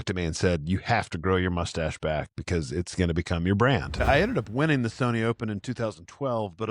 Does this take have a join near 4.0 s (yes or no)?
yes